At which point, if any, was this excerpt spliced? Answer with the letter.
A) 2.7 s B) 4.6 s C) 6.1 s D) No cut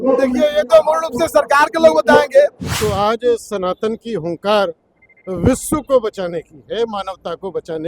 A